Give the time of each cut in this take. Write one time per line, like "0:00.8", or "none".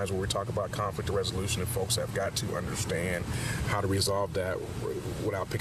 0:01.2